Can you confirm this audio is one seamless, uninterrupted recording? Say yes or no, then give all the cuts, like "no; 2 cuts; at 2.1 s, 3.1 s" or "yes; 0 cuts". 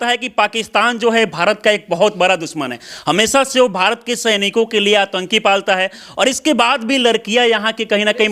yes; 0 cuts